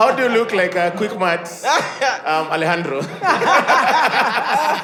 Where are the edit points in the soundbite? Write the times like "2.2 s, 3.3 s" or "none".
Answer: none